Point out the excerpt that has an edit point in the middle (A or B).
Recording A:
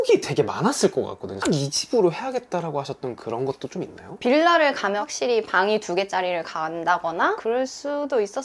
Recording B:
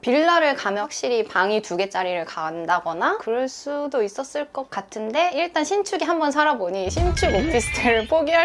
A